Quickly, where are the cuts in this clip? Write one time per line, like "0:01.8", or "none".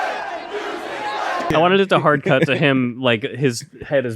0:01.5

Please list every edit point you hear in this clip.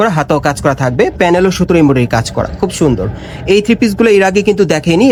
none

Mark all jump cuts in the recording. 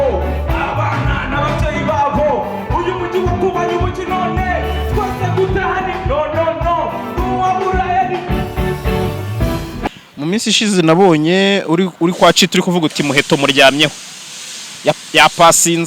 0:09.9

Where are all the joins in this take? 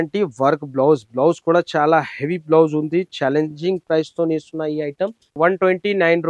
0:05.3

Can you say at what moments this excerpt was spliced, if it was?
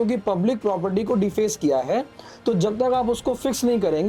none

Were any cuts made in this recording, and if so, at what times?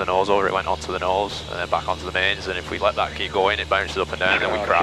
none

